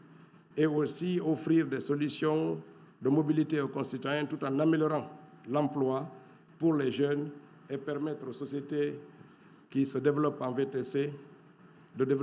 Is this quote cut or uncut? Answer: uncut